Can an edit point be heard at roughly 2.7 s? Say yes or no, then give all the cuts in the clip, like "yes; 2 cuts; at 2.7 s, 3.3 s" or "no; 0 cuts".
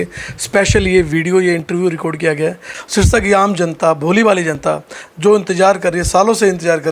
yes; 1 cut; at 2.7 s